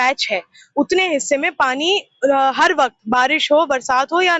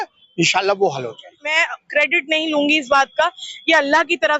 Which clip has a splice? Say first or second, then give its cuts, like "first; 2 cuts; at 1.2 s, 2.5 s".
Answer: second; 1 cut; at 1.5 s